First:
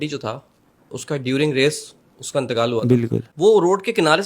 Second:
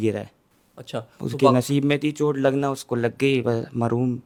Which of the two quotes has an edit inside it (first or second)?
first